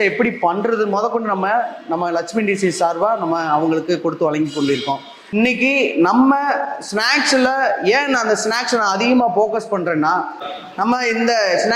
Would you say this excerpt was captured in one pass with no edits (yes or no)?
no